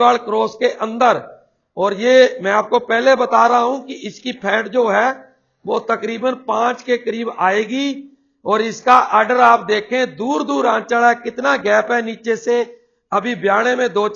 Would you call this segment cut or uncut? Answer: uncut